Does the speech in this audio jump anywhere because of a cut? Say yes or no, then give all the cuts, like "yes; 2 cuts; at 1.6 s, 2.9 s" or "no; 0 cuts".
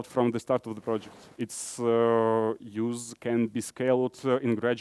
no; 0 cuts